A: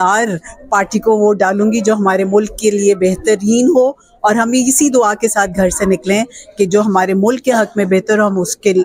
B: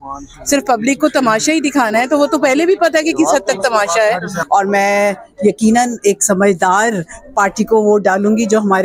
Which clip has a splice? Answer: B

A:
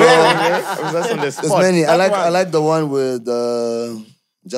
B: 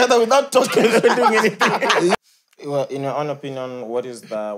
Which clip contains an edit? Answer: B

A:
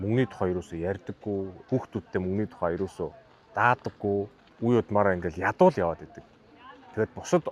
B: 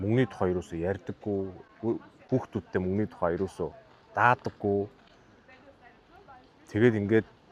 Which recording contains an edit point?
A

